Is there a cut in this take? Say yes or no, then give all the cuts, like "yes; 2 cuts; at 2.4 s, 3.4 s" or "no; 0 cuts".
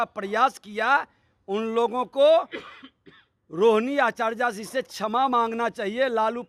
no; 0 cuts